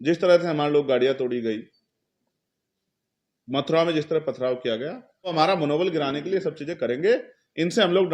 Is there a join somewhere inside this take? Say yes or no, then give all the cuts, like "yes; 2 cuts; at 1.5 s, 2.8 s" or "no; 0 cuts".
yes; 1 cut; at 5.3 s